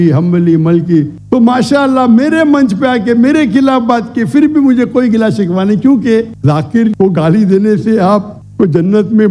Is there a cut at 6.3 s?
yes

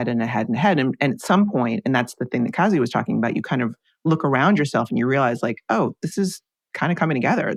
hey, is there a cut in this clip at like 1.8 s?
no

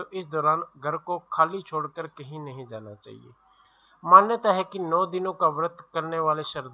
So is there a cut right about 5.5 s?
no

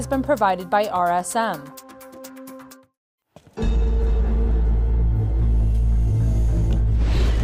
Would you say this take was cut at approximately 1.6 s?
yes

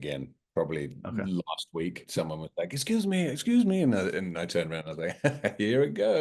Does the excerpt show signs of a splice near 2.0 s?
yes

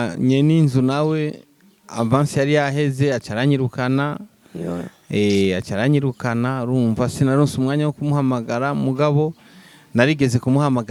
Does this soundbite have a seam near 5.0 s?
no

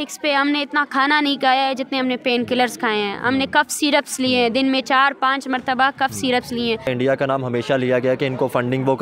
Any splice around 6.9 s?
yes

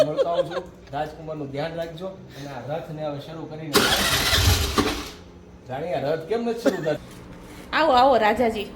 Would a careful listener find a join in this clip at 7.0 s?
yes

